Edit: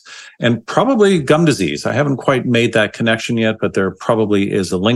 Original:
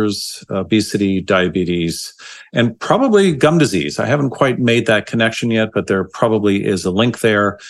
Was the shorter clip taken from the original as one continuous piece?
yes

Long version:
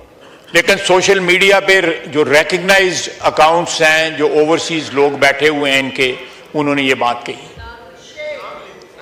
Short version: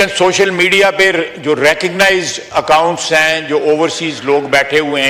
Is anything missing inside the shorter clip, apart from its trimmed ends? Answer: no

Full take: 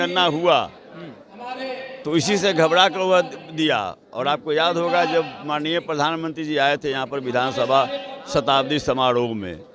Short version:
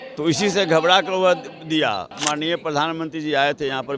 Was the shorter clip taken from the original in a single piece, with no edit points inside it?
no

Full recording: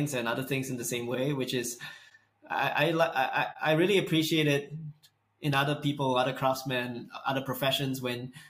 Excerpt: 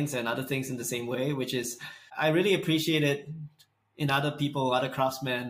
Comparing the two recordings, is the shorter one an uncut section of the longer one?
no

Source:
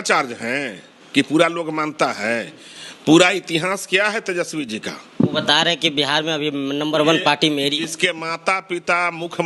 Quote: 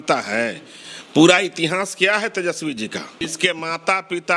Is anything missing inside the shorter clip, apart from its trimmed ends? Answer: yes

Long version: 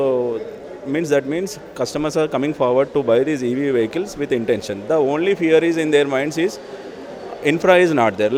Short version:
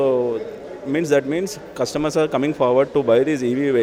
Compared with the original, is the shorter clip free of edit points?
yes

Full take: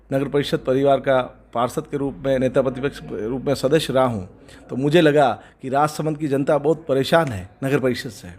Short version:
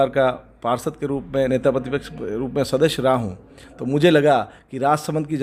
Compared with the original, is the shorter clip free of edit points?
yes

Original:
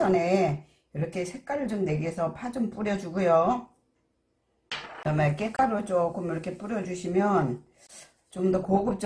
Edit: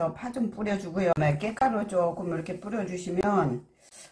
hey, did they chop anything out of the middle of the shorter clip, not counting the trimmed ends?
yes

